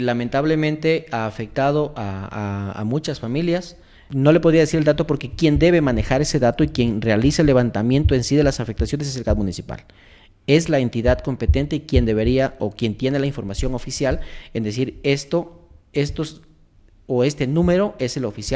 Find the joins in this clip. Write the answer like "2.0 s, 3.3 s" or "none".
4.0 s